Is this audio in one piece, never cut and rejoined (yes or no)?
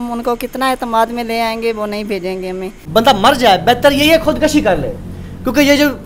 no